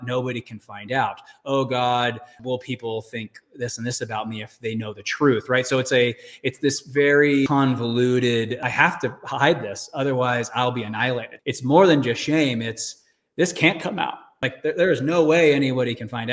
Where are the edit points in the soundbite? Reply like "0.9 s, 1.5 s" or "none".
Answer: 2.3 s, 7.5 s, 8.6 s, 11.3 s, 14.4 s